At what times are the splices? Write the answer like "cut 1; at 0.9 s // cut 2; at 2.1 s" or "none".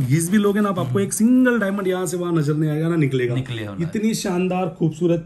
none